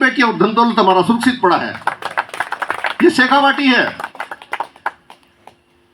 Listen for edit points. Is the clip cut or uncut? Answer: uncut